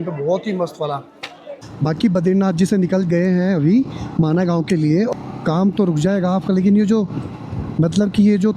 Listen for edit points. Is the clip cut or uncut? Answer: cut